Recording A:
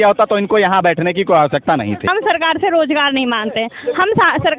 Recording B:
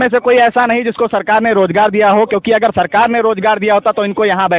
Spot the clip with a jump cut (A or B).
A